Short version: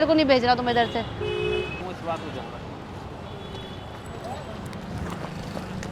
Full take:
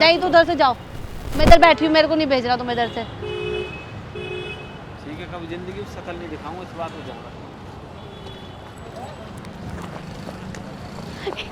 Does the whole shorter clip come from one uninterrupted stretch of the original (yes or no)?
no